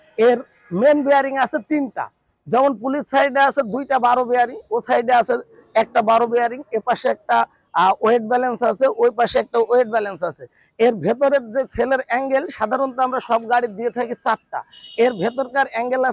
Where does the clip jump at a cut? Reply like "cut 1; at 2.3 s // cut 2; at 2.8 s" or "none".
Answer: none